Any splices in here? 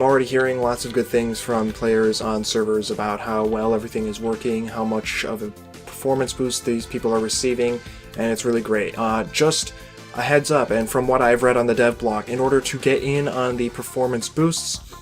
yes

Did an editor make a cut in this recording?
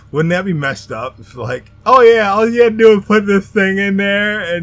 no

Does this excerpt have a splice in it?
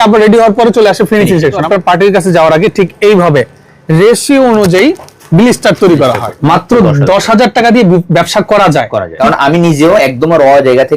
yes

